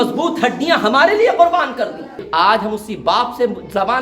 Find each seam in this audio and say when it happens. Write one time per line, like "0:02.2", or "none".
0:02.2